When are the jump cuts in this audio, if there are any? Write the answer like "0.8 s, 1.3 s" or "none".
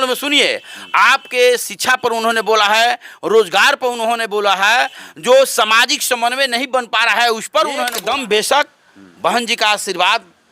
7.9 s